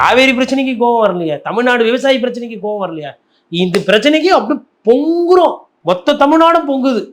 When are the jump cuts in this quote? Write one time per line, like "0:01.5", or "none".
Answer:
0:05.7